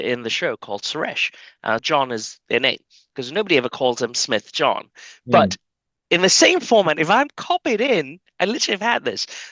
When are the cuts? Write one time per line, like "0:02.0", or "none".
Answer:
0:01.8

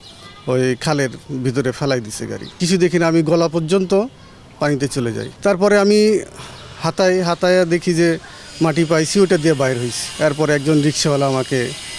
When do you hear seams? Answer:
0:02.6
0:05.3
0:10.0

